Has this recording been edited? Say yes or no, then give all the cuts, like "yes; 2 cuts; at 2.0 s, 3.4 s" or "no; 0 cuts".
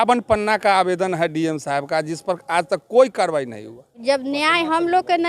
yes; 1 cut; at 3.9 s